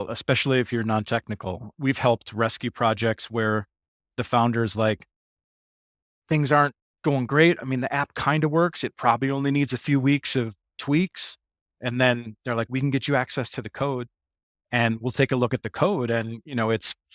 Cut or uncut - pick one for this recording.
cut